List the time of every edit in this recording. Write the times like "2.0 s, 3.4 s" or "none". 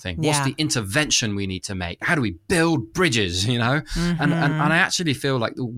2.1 s